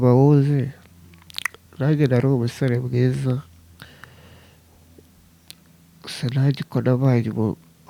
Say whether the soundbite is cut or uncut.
uncut